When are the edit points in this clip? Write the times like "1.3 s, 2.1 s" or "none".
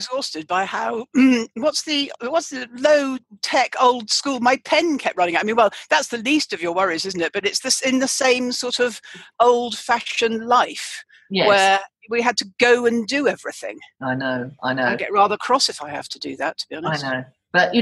none

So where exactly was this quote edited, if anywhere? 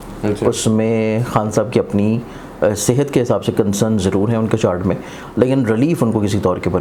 none

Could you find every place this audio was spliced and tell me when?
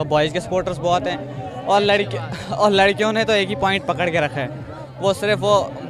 none

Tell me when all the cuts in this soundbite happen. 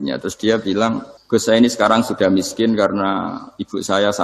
1.1 s

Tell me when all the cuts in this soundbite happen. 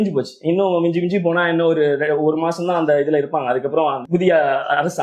4.0 s

